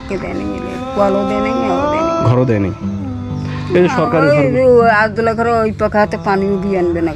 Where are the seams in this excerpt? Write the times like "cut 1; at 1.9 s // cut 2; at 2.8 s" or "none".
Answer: none